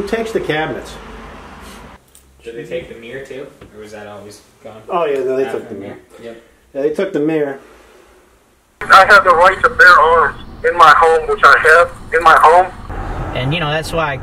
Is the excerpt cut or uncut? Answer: cut